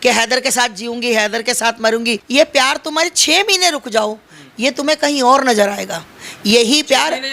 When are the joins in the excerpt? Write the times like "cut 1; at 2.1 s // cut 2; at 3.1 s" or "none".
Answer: cut 1; at 2.2 s